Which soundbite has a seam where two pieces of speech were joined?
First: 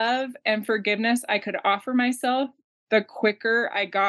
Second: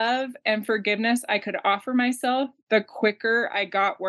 second; 1 cut; at 2.6 s

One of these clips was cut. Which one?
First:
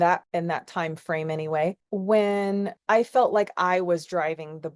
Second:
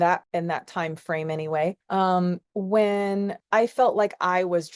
first; 1 cut; at 1.8 s

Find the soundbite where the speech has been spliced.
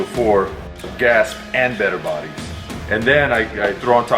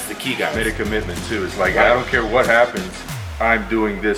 first; 2 cuts; at 0.9 s, 2.7 s

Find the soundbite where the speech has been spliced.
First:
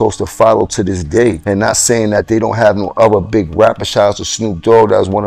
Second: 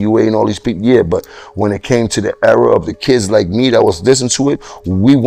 first; 1 cut; at 1.4 s

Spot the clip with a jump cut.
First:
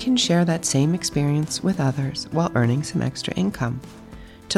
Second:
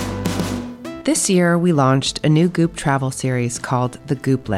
second; 1 cut; at 1.0 s

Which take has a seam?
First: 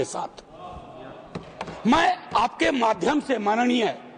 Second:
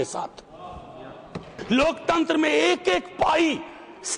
second; 1 cut; at 1.5 s

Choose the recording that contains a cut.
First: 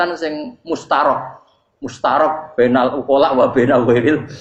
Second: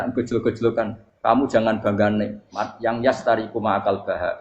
second; 1 cut; at 1.0 s

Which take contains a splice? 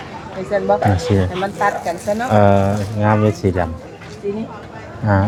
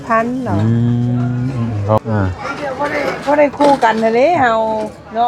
second; 1 cut; at 2.0 s

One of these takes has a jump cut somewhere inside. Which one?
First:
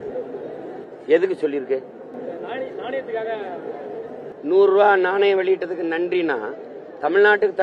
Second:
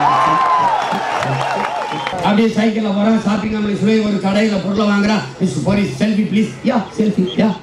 second; 1 cut; at 2.1 s

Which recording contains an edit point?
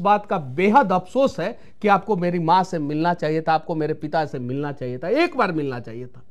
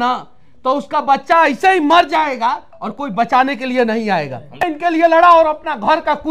second; 1 cut; at 4.6 s

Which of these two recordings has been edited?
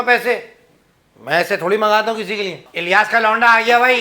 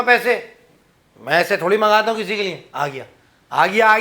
first; 1 cut; at 2.7 s

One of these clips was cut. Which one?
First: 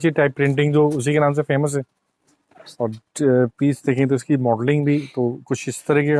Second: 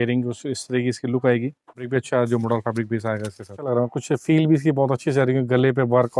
second; 2 cuts; at 1.9 s, 3.5 s

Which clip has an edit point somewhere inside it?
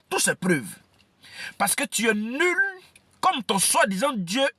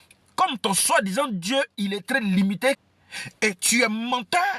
second; 1 cut; at 2.8 s

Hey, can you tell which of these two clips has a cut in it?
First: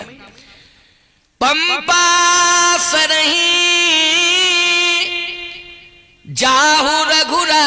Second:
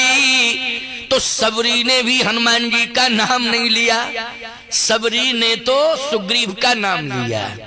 second; 1 cut; at 6.5 s

